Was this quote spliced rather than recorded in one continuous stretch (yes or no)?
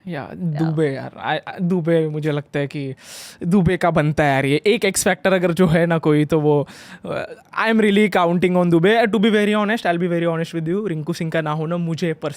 no